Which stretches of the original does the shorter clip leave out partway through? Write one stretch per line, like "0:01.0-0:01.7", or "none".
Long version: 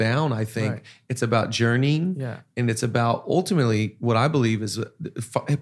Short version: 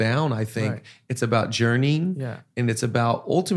none